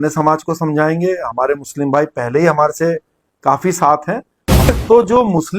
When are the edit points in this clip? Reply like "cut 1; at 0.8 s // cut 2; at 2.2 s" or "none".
cut 1; at 4.7 s